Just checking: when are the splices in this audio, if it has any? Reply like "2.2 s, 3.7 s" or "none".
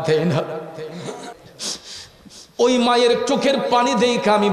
1.3 s